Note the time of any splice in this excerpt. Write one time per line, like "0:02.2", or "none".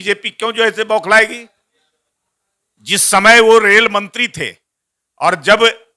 none